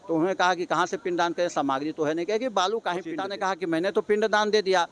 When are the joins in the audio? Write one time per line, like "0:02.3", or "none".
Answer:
0:03.2